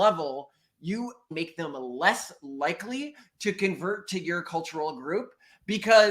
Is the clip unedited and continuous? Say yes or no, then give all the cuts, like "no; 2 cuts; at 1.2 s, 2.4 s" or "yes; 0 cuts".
no; 1 cut; at 1.3 s